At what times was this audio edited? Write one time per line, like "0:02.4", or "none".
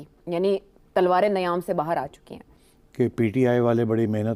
none